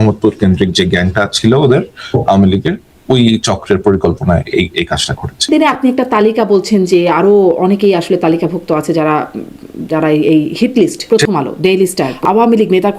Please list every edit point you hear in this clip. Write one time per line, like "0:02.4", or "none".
0:05.5
0:11.0
0:12.1